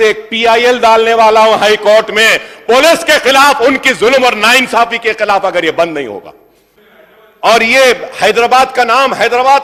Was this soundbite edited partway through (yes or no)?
no